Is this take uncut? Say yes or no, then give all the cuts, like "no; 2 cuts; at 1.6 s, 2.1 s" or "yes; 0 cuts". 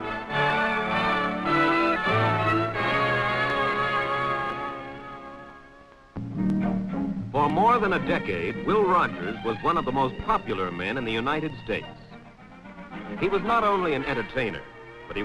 no; 1 cut; at 13.4 s